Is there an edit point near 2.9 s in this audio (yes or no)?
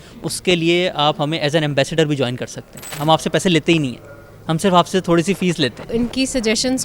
yes